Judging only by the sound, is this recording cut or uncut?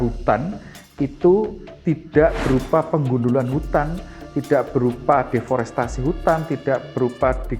uncut